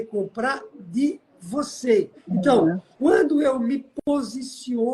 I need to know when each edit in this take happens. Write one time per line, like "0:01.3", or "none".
0:02.2
0:02.9